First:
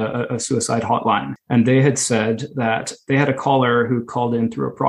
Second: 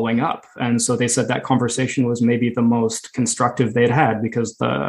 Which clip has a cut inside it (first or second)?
first